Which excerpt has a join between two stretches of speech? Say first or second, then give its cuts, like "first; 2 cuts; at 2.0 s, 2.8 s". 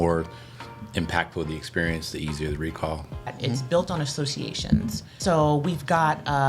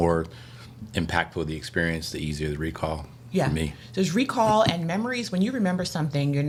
first; 2 cuts; at 3.3 s, 5.2 s